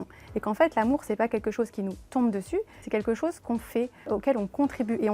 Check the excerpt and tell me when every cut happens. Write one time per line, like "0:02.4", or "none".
0:02.8
0:04.1